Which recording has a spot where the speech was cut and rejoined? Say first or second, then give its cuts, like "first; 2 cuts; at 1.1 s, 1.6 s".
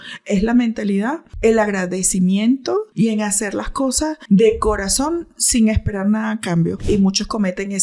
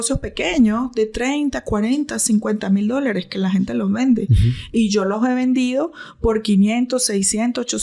first; 4 cuts; at 1.3 s, 2.9 s, 4.2 s, 6.8 s